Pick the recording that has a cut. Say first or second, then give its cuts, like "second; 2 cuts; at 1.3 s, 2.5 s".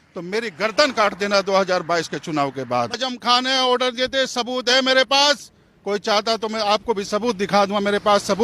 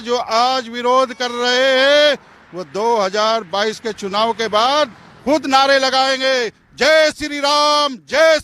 first; 1 cut; at 3.0 s